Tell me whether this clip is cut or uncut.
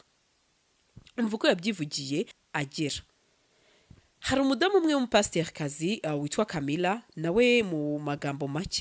cut